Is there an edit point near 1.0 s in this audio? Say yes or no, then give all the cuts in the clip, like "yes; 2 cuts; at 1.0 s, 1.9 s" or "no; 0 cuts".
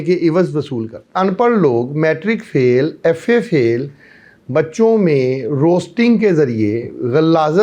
yes; 1 cut; at 1.0 s